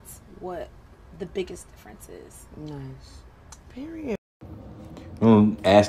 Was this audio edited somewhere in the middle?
no; 0 cuts

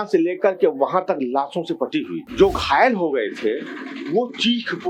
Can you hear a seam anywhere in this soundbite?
yes; 1 cut; at 2.2 s

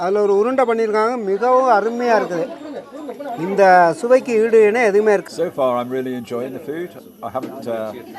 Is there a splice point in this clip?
yes; 1 cut; at 5.2 s

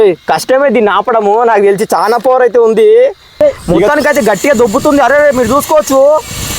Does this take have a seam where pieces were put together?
yes; 1 cut; at 3.6 s

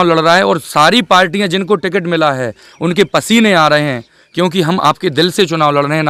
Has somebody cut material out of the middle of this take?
no; 0 cuts

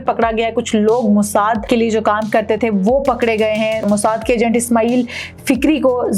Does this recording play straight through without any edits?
no; 2 cuts; at 1.6 s, 3.8 s

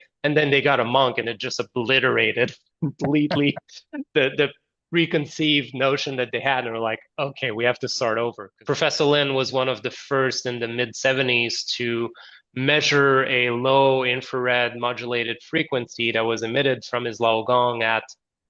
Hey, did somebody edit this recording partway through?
yes; 1 cut; at 8.5 s

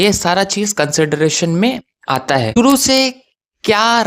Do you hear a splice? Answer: yes; 1 cut; at 2.6 s

